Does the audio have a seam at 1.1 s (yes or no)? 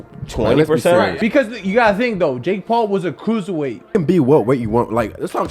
yes